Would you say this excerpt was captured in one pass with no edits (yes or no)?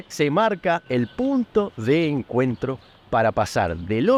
yes